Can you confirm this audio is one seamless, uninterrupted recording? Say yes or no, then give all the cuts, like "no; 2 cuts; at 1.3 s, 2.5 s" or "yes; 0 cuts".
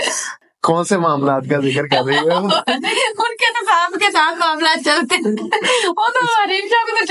yes; 0 cuts